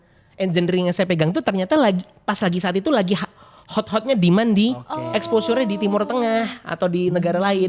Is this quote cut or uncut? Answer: uncut